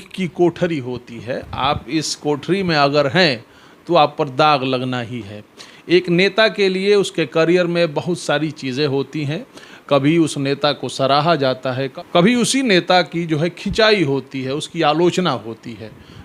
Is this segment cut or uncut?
uncut